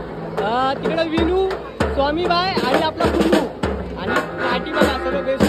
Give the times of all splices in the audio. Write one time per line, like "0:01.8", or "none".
none